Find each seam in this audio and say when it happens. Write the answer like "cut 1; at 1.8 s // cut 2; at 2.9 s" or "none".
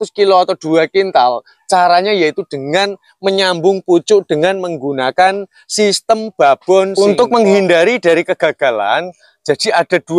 cut 1; at 6.9 s

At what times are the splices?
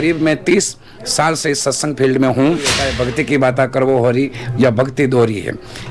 cut 1; at 2.8 s

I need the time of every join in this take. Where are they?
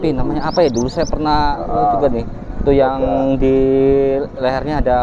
none

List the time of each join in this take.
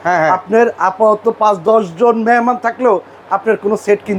none

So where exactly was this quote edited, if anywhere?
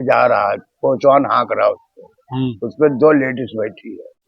none

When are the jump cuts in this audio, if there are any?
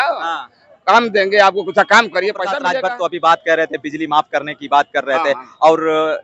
cut 1; at 2.6 s

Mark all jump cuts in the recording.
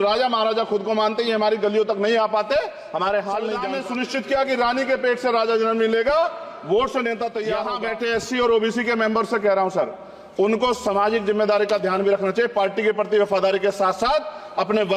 cut 1; at 3.7 s // cut 2; at 7.7 s

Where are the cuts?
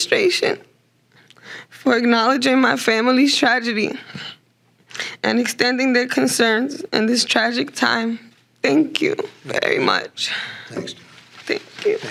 none

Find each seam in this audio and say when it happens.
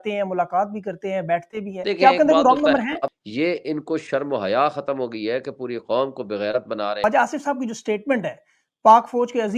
cut 1; at 1.7 s // cut 2; at 3.2 s // cut 3; at 7.0 s

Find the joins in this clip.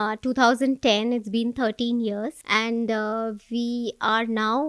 cut 1; at 2.4 s

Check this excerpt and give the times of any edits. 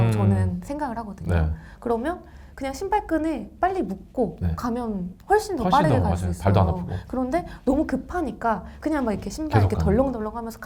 none

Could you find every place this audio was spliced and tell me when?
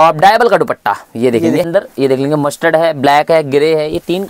cut 1; at 1.7 s

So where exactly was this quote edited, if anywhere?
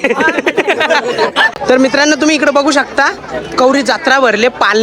cut 1; at 1.6 s

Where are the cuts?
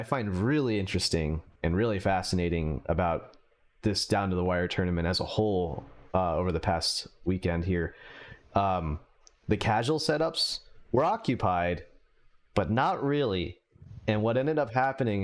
none

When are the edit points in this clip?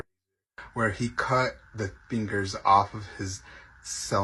none

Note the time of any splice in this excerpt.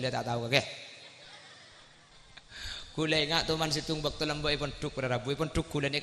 cut 1; at 2.1 s

